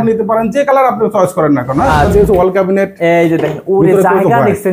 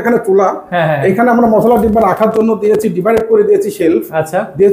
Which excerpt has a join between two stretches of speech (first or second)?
first